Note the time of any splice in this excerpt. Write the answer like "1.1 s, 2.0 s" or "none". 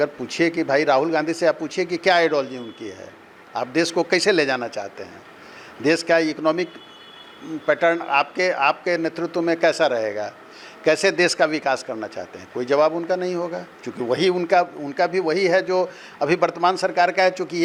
none